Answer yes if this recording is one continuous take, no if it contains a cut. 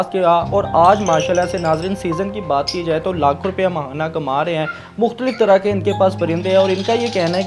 yes